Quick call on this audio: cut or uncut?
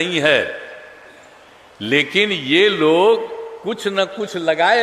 uncut